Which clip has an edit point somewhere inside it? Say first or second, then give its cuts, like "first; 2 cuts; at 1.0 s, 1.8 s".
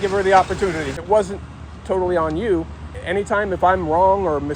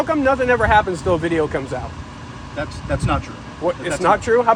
first; 2 cuts; at 1.0 s, 3.0 s